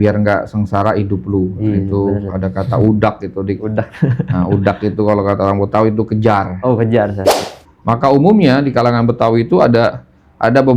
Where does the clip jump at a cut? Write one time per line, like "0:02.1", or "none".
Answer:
0:07.3